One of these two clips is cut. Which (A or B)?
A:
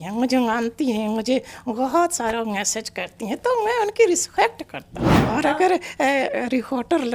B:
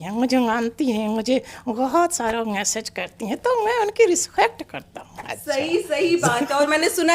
A